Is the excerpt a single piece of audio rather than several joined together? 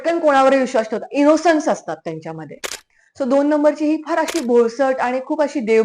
yes; 0 cuts

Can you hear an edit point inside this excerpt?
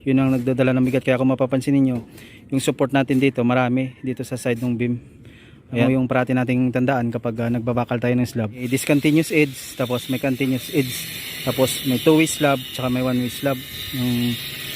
yes; 2 cuts; at 5.8 s, 8.6 s

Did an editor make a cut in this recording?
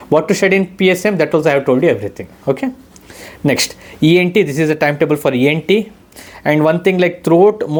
no; 0 cuts

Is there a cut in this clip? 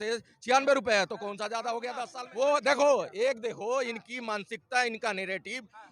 yes; 1 cut; at 2.0 s

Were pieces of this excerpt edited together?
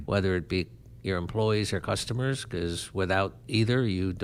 no; 0 cuts

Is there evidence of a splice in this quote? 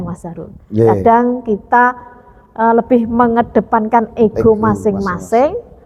no; 0 cuts

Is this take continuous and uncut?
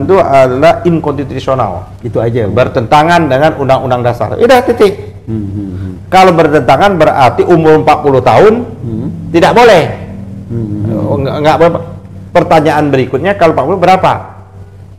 yes; 0 cuts

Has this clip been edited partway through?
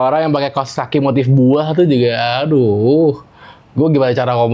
no; 0 cuts

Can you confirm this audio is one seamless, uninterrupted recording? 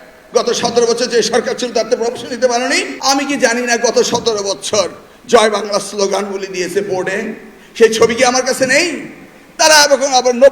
no; 1 cut; at 2.9 s

